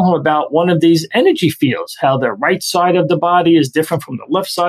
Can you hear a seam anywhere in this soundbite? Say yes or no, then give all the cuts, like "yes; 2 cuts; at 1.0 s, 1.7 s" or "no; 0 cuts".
no; 0 cuts